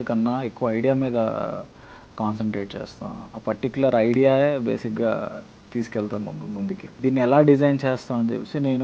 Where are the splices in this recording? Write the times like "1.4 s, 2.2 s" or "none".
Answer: 7.0 s